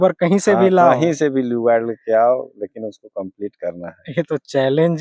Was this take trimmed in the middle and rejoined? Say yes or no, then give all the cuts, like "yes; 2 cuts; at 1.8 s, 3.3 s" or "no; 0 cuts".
no; 0 cuts